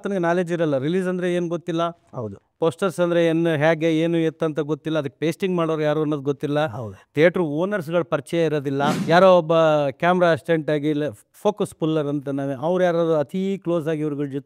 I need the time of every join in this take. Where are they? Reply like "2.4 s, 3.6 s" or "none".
9.0 s